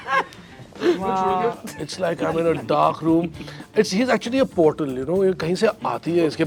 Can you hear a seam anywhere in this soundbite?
yes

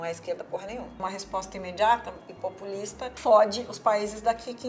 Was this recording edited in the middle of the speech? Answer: yes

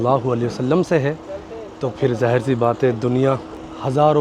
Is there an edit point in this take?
no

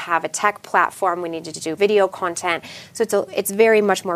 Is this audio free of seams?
no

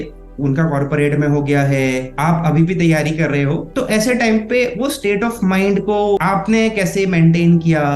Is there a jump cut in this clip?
yes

